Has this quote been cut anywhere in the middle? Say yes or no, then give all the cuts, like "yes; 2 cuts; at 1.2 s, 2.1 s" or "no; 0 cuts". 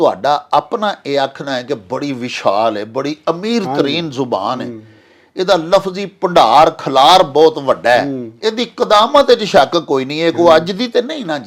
no; 0 cuts